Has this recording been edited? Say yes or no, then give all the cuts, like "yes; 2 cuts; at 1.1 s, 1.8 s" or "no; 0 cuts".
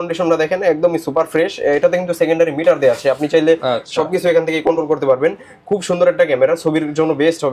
no; 0 cuts